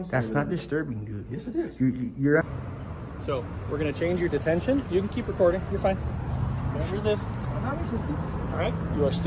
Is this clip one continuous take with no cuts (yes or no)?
no